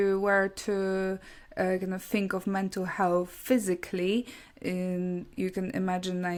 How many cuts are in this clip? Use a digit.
0